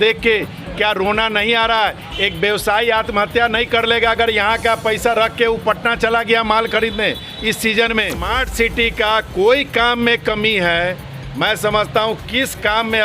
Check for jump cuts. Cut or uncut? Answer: cut